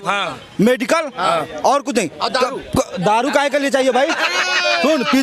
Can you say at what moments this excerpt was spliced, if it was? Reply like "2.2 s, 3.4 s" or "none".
none